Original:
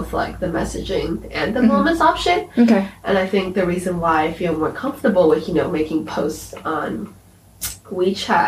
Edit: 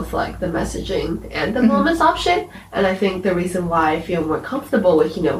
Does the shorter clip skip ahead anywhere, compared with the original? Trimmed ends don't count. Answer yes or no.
yes